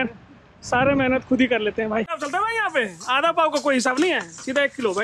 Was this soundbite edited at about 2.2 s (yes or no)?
yes